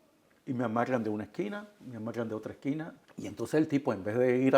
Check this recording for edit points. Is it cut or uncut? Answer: cut